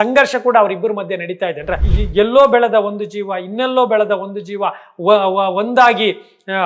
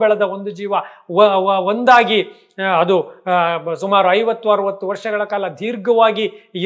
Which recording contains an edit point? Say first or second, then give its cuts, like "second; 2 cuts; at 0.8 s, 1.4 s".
first; 1 cut; at 1.9 s